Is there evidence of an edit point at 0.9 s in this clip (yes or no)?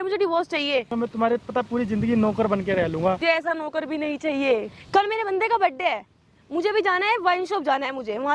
yes